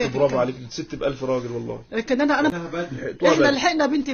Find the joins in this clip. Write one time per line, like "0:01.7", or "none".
0:02.5

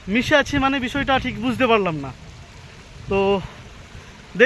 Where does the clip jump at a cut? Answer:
none

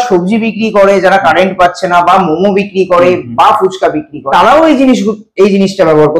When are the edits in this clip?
0:04.1

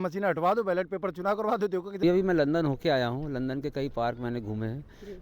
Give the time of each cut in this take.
0:02.0

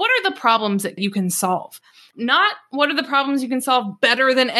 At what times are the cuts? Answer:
0:01.0

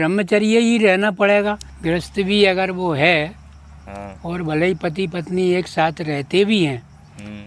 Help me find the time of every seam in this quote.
0:01.7

